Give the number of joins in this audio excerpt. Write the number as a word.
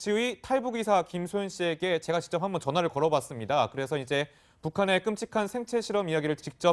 one